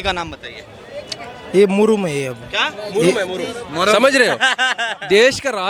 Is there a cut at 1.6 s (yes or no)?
no